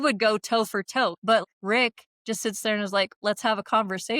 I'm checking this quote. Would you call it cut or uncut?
cut